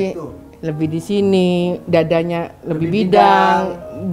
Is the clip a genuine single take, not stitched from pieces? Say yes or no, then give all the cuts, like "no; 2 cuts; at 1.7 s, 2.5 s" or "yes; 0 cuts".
yes; 0 cuts